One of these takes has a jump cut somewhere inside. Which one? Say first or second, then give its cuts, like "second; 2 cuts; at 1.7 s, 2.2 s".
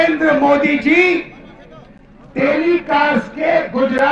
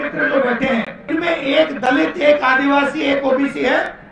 second; 1 cut; at 1.1 s